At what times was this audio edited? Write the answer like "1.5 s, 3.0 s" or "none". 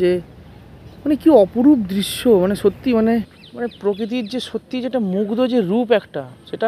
3.4 s